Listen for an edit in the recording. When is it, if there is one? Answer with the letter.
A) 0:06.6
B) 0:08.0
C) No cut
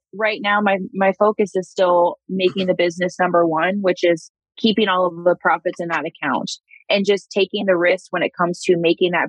A